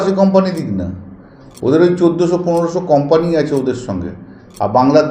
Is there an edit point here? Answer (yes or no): no